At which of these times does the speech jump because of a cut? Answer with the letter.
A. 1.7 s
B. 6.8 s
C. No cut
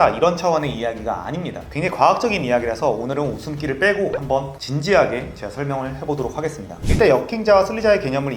B